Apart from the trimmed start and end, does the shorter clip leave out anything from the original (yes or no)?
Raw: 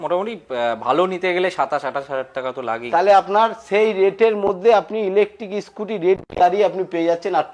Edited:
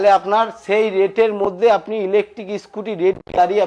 no